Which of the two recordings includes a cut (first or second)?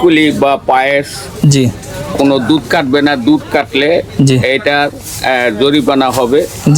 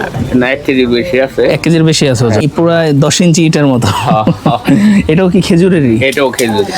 second